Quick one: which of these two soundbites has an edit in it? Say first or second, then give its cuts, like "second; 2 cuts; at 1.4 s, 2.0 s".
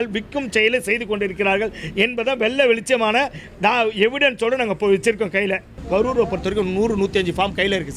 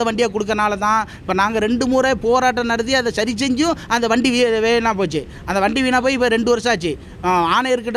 first; 1 cut; at 5.7 s